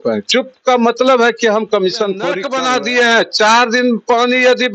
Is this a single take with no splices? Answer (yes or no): no